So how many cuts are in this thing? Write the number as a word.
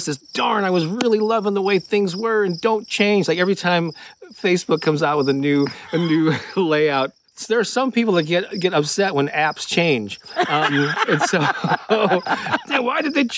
one